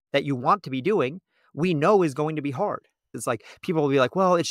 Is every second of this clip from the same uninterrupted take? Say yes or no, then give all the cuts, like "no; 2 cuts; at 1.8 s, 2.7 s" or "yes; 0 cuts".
no; 1 cut; at 3.1 s